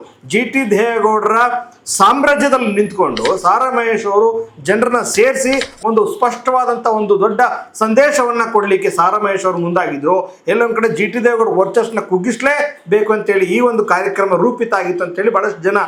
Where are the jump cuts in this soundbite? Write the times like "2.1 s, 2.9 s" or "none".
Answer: none